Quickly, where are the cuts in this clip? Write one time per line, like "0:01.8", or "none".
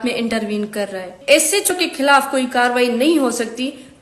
0:01.1